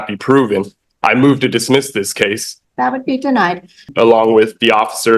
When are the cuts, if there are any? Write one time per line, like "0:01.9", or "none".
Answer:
0:02.5
0:03.9